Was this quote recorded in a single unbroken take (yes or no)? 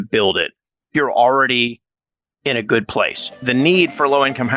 no